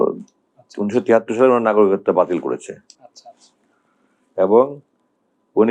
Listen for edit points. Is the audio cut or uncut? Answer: uncut